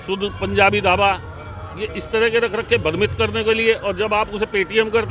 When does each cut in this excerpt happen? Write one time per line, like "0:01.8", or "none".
none